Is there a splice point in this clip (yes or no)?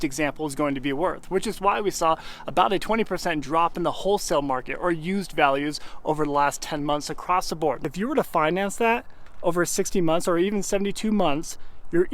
yes